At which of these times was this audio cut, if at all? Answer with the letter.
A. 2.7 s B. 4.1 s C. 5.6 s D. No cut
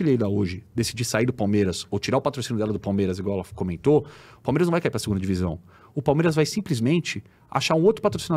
D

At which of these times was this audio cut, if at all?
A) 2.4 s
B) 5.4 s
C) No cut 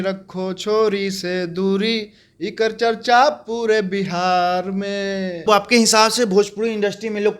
B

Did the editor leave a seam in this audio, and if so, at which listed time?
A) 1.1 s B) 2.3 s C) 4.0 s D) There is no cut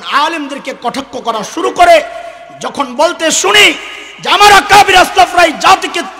D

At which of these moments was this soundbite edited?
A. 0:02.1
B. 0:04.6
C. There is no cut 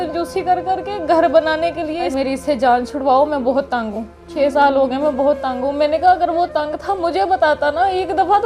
A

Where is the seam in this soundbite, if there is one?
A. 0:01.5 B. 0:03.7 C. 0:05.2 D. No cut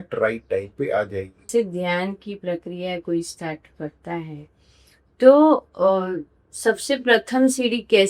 A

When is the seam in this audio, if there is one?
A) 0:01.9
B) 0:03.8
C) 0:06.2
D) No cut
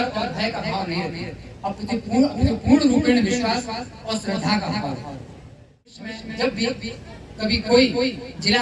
C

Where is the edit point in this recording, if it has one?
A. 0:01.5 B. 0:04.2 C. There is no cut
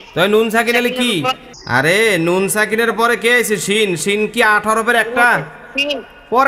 A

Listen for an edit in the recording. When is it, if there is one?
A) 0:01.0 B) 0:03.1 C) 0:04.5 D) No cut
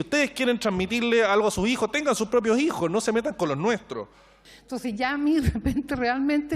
C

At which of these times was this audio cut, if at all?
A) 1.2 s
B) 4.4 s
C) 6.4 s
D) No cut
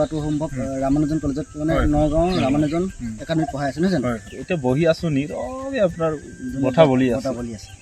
B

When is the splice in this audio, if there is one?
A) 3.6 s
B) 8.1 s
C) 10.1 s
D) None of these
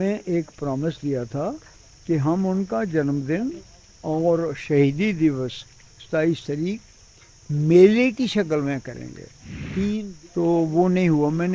C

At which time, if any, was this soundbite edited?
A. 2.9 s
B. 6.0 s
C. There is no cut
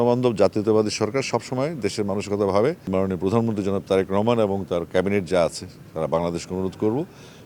A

